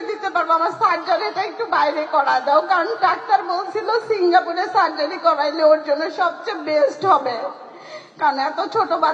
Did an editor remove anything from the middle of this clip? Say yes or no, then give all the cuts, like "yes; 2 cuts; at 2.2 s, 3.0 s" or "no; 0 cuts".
no; 0 cuts